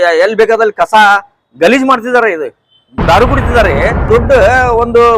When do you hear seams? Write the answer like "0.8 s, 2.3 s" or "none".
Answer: 4.0 s